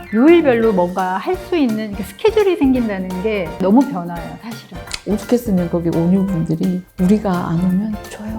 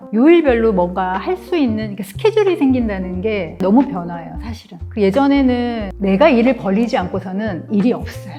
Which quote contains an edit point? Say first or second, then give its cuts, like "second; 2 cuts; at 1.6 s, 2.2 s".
first; 1 cut; at 4.9 s